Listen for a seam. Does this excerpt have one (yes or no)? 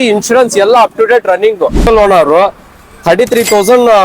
yes